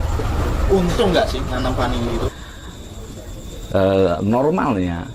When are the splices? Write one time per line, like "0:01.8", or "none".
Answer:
0:02.3